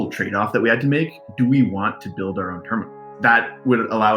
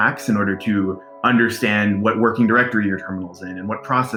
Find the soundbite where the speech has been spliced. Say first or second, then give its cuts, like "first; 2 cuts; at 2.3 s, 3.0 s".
first; 2 cuts; at 1.2 s, 3.0 s